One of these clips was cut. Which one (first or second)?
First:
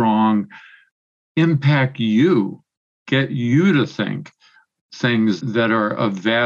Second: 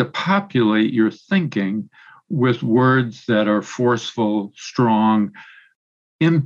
first